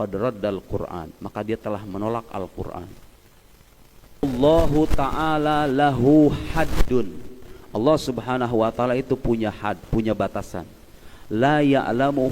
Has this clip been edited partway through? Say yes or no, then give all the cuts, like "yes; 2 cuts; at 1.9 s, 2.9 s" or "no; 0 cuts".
yes; 1 cut; at 4.2 s